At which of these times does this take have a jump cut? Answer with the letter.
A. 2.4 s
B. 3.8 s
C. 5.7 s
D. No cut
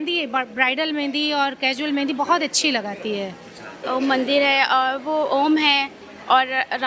B